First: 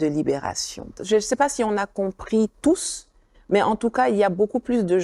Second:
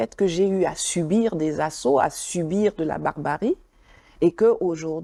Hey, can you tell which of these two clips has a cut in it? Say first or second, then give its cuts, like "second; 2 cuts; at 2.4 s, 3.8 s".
first; 1 cut; at 0.9 s